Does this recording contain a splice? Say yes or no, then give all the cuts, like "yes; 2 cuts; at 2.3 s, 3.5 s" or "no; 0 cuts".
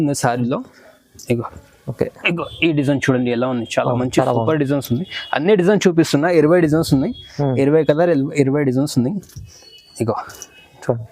no; 0 cuts